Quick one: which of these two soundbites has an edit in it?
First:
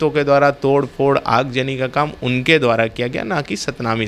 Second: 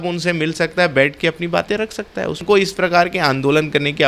second; 1 cut; at 2.4 s

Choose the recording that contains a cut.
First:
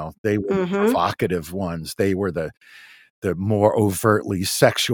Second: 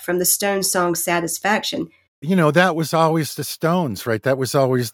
second; 1 cut; at 2.2 s

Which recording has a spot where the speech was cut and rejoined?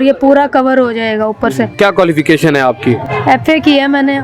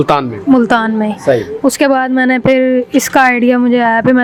first; 2 cuts; at 1.7 s, 3.1 s

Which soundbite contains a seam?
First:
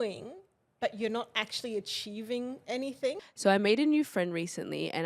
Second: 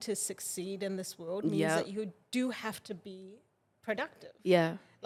first; 1 cut; at 3.2 s

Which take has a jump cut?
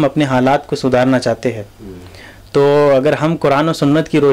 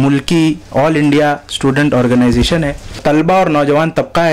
second; 1 cut; at 3.0 s

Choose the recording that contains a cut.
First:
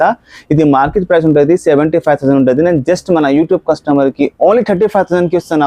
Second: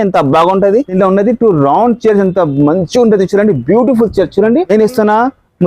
second; 2 cuts; at 0.9 s, 4.7 s

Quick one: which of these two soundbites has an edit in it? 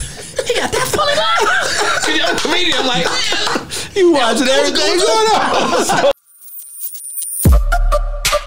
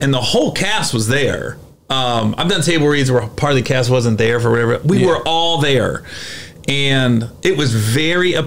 first; 1 cut; at 6.1 s

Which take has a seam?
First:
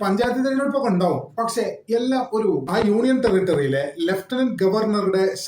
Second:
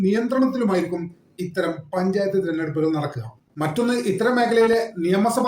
second; 1 cut; at 3.4 s

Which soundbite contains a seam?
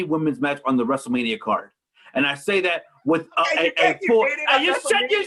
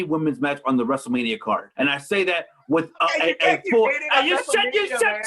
second; 1 cut; at 1.7 s

